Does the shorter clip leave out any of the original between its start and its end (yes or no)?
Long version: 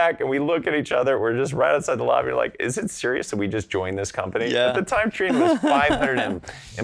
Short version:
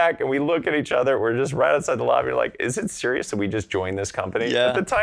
no